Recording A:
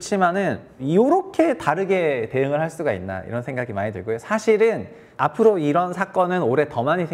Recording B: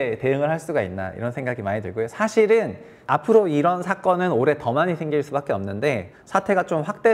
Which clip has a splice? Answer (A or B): B